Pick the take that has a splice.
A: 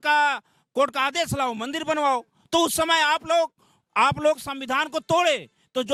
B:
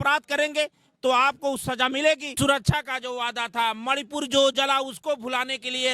B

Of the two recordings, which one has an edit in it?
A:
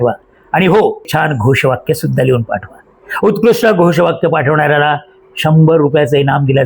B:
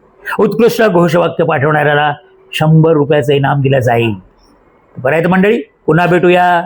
A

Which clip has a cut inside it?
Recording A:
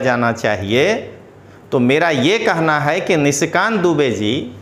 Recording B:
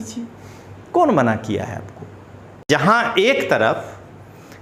B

